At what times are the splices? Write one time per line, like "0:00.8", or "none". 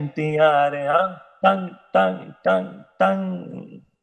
none